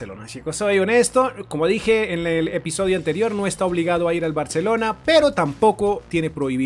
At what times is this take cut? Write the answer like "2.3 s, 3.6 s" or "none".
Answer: none